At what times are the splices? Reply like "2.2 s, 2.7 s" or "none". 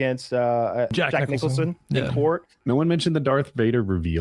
0.9 s, 2.6 s